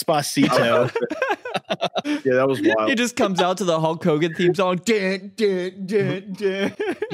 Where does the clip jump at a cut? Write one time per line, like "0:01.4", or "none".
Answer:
none

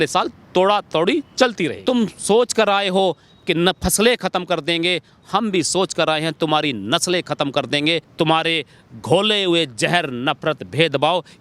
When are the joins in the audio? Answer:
0:01.8
0:08.1

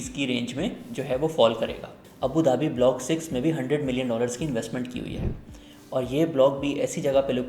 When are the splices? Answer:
0:02.0

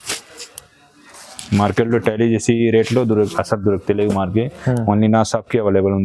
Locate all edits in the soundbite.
none

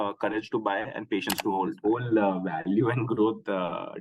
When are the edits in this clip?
0:01.8

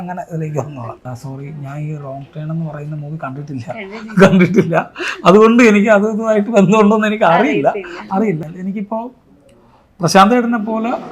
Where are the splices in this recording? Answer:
0:01.1
0:08.4

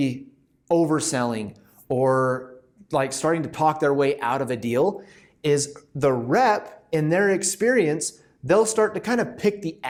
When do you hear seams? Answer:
none

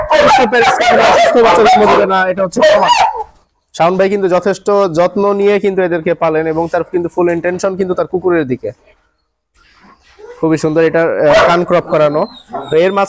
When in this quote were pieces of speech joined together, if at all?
0:03.3

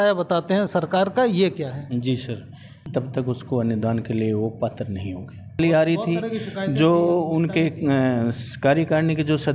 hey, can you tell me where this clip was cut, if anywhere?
0:02.8
0:05.6

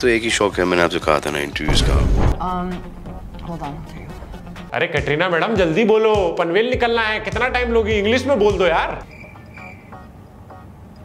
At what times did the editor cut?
0:02.3

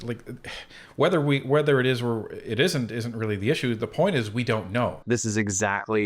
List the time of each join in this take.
0:05.0

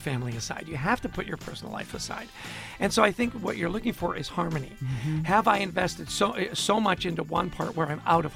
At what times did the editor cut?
none

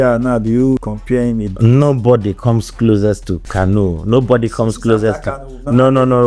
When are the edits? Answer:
0:00.8
0:03.4

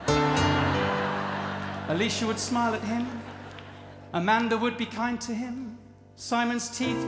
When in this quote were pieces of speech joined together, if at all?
none

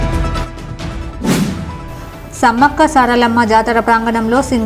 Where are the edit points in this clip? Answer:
0:01.7

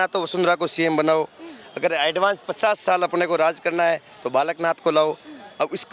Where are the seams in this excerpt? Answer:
none

